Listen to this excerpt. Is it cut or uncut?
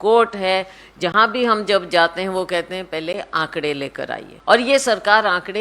cut